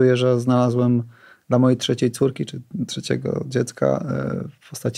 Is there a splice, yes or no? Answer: no